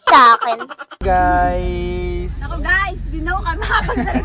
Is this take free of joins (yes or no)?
no